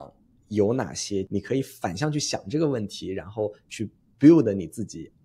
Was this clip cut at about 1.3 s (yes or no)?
yes